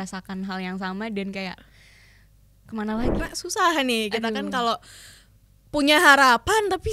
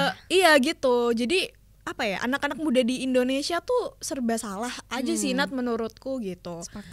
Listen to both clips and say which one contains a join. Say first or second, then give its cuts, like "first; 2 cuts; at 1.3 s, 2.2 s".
first; 1 cut; at 3.2 s